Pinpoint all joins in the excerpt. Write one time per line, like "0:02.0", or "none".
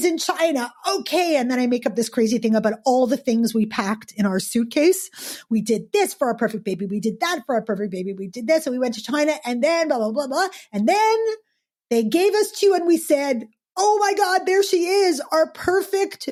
none